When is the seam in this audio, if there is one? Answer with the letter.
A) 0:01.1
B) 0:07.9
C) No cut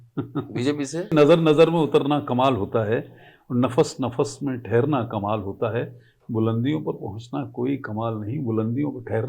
A